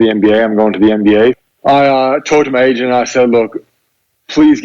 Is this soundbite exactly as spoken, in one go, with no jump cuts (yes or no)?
no